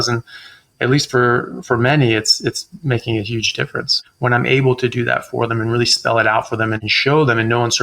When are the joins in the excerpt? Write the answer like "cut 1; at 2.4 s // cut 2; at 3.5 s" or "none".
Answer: cut 1; at 4.0 s // cut 2; at 6.9 s